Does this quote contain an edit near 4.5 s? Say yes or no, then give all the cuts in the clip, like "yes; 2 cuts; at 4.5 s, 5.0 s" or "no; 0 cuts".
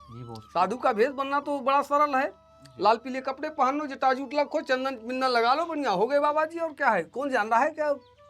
no; 0 cuts